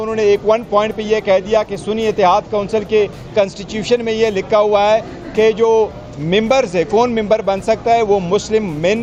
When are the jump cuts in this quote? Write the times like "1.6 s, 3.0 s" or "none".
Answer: none